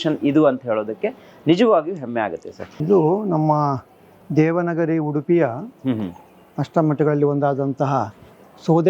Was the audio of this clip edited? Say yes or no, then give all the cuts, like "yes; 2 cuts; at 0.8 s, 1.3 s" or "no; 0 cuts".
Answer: no; 0 cuts